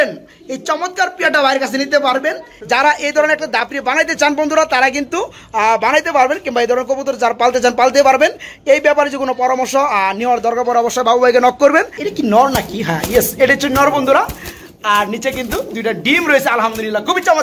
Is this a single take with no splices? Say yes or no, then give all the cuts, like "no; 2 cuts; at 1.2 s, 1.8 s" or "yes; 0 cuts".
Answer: no; 2 cuts; at 2.5 s, 12.0 s